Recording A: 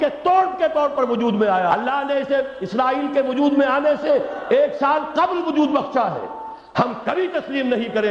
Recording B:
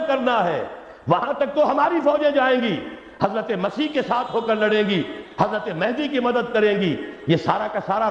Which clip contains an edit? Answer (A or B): A